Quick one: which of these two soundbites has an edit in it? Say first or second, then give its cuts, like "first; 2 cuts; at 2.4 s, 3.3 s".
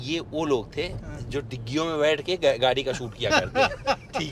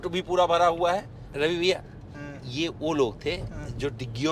second; 1 cut; at 1.2 s